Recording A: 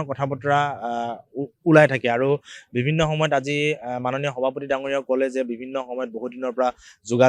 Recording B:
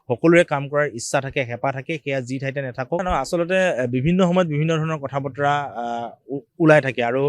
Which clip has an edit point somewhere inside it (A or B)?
B